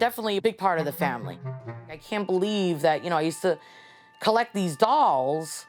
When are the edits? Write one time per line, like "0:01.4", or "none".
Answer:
0:02.0